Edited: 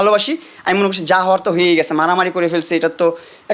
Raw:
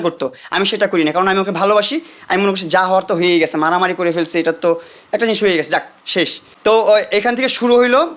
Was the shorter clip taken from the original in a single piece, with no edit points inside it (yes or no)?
yes